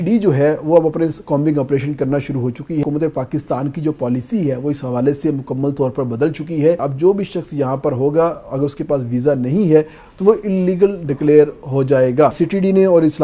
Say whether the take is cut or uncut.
cut